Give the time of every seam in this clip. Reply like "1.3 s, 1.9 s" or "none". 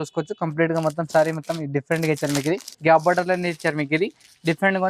2.7 s